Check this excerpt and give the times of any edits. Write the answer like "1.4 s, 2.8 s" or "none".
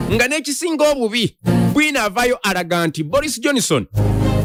none